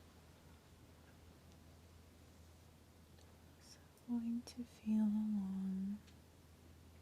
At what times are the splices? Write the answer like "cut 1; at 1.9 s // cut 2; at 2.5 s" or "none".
cut 1; at 2.7 s